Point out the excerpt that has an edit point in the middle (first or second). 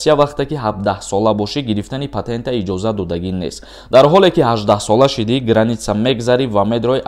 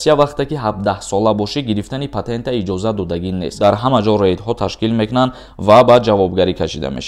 second